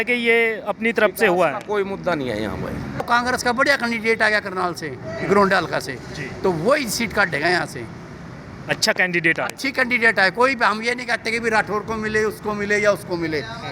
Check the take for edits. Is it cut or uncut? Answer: cut